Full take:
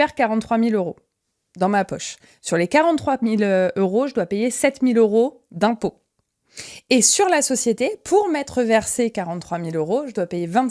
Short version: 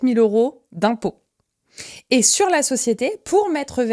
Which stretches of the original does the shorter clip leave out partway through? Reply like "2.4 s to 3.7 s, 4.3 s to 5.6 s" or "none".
none

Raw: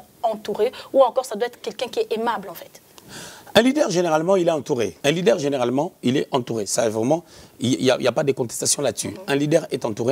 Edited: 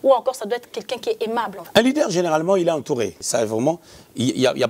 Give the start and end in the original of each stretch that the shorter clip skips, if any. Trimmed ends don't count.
2.5 s to 3.4 s, 5.0 s to 6.6 s

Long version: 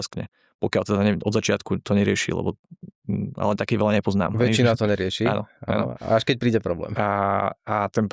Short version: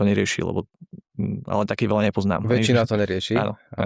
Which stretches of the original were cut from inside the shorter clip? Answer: none

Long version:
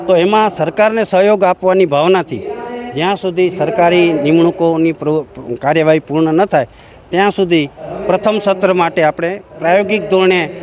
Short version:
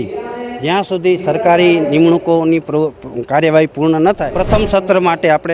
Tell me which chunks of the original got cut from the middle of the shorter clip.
6.6 s to 8.0 s

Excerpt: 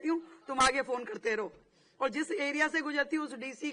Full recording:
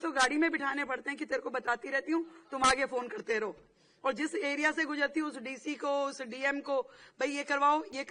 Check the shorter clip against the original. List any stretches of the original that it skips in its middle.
none

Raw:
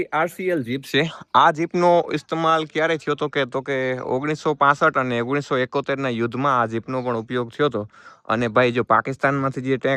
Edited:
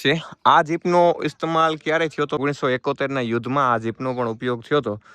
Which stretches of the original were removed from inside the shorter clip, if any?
3.3 s to 5.3 s

